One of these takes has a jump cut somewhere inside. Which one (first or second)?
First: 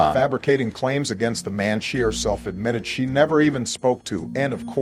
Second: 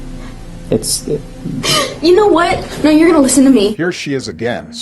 second